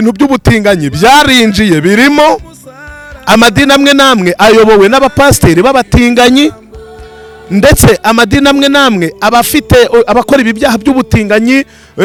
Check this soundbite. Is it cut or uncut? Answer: uncut